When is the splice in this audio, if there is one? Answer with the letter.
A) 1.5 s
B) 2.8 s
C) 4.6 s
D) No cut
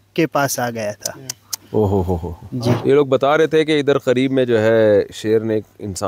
B